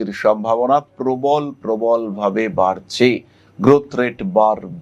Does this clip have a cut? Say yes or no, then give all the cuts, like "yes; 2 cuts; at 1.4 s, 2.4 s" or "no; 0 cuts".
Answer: no; 0 cuts